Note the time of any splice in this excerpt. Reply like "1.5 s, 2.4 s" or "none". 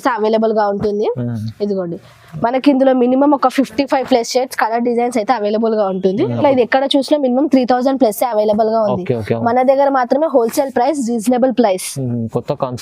6.4 s